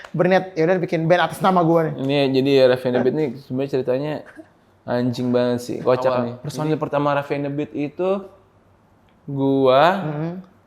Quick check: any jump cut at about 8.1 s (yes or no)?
no